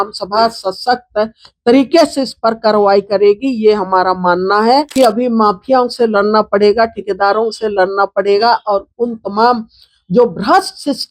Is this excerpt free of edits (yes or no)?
no